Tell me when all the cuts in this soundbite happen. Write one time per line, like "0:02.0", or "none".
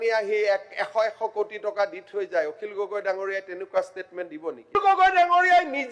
0:04.7